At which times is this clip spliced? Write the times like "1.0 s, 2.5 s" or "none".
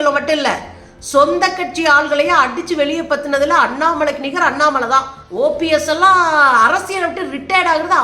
5.2 s